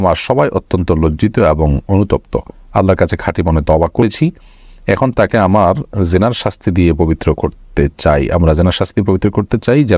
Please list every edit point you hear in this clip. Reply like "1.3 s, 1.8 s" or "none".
4.0 s